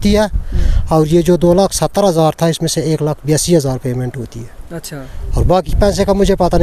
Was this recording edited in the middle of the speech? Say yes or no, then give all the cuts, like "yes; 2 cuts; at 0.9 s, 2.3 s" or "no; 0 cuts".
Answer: no; 0 cuts